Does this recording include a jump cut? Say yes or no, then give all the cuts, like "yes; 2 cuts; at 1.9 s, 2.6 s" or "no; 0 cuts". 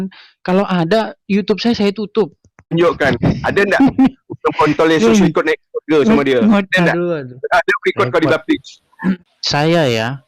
yes; 2 cuts; at 2.7 s, 9.2 s